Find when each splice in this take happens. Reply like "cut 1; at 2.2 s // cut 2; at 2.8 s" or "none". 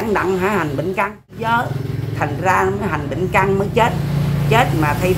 cut 1; at 1.5 s